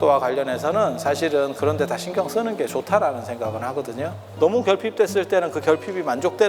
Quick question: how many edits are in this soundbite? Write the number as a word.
one